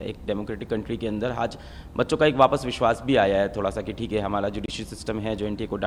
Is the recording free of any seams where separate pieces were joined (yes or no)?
yes